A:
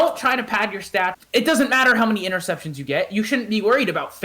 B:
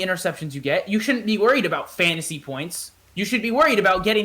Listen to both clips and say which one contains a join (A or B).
A